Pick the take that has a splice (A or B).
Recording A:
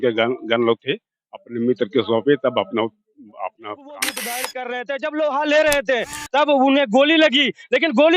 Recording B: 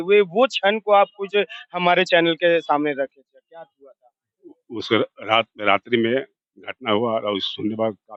A